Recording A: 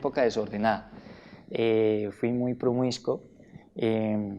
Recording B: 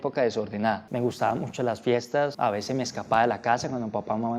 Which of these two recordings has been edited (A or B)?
B